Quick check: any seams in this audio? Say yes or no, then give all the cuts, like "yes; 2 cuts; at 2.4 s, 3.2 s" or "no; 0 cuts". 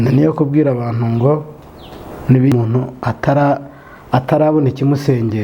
yes; 1 cut; at 2.5 s